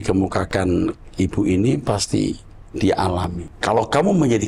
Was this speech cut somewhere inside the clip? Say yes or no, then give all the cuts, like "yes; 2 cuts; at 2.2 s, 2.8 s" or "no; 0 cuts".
yes; 1 cut; at 3.5 s